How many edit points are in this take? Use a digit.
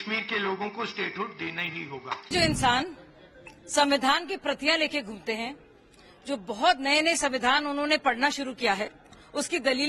1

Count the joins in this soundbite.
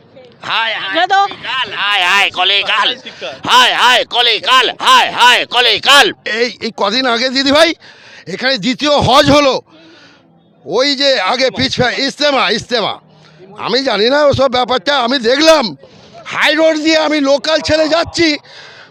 0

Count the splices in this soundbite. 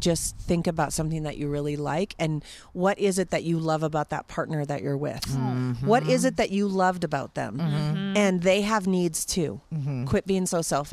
0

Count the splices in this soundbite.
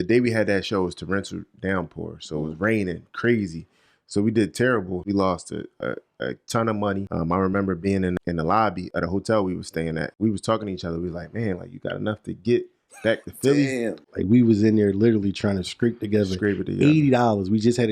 5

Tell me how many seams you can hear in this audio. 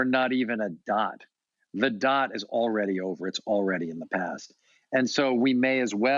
0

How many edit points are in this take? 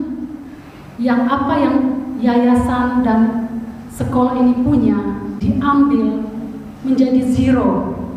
1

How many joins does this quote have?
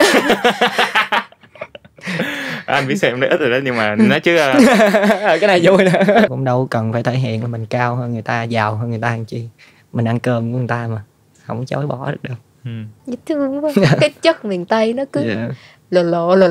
2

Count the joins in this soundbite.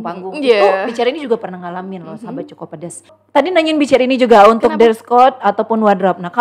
1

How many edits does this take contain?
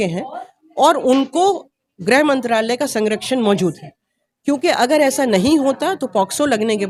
0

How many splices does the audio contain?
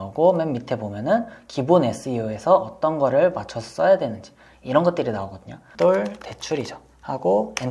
1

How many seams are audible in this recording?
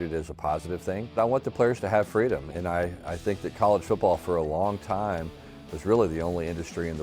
1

